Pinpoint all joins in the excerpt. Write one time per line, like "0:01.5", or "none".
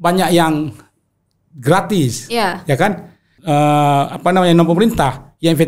0:03.3